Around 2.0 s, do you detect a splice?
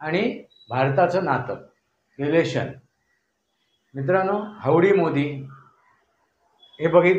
no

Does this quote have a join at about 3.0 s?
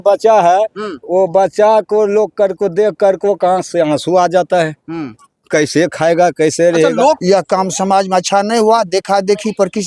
no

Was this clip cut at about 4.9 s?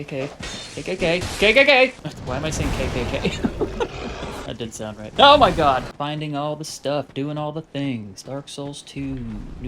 yes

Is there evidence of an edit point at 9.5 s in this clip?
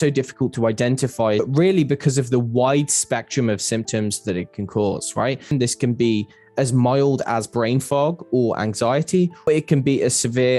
yes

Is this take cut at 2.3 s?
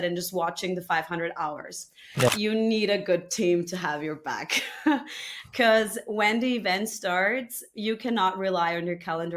yes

